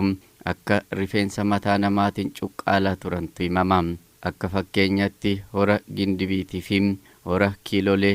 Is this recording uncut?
yes; 0 cuts

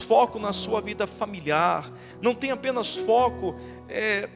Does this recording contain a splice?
no; 0 cuts

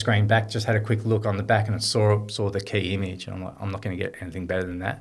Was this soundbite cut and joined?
no; 0 cuts

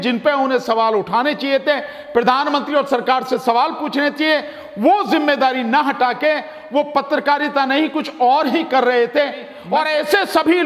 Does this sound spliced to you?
yes; 1 cut; at 9.5 s

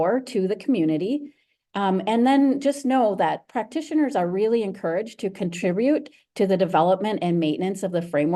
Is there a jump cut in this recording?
no; 0 cuts

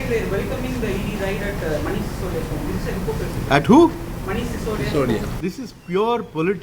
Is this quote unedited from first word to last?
no; 1 cut; at 5.3 s

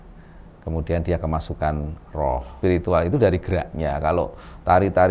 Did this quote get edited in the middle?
yes; 1 cut; at 2.6 s

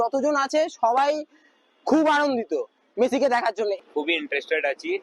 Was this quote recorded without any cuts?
yes; 0 cuts

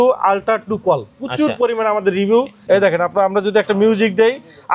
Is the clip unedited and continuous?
no; 1 cut; at 2.6 s

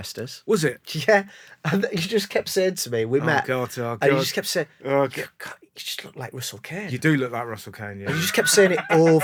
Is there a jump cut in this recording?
no; 0 cuts

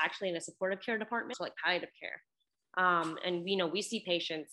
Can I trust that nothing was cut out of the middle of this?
no; 1 cut; at 1.3 s

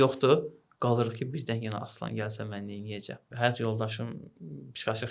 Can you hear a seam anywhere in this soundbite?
yes; 1 cut; at 3.3 s

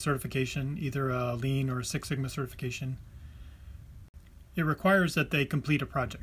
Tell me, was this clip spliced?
yes; 1 cut; at 4.1 s

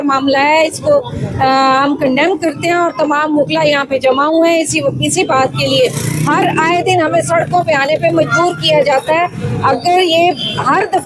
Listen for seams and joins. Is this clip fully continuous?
yes; 0 cuts

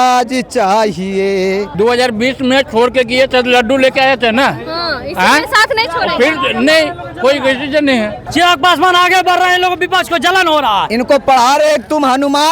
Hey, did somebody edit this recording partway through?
yes; 3 cuts; at 1.7 s, 8.2 s, 10.9 s

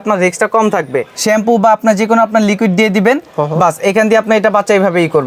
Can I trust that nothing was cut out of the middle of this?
no; 1 cut; at 1.1 s

